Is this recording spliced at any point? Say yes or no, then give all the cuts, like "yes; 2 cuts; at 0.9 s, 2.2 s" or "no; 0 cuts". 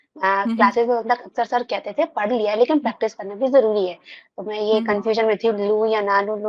no; 0 cuts